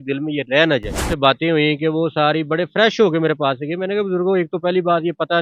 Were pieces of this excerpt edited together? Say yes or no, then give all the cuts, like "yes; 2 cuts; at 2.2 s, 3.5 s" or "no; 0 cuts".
yes; 1 cut; at 1.1 s